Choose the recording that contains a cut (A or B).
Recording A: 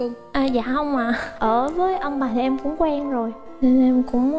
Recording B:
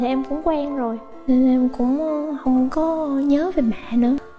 A